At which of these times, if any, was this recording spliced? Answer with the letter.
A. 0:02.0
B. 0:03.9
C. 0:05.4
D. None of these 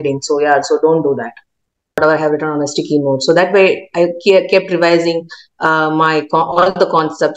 A